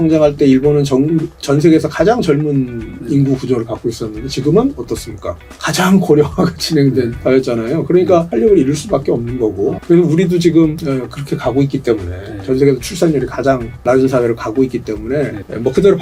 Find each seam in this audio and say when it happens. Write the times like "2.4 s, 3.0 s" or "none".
none